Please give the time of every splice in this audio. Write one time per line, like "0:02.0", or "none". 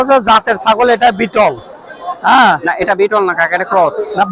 none